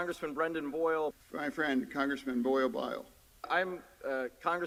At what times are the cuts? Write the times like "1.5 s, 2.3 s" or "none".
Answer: none